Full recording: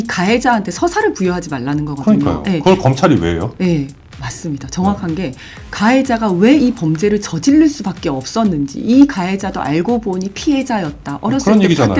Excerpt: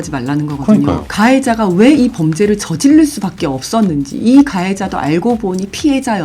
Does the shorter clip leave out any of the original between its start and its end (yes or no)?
yes